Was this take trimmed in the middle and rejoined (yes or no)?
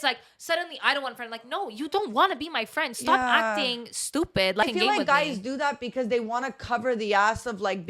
yes